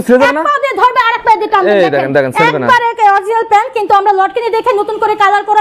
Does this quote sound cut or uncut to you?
uncut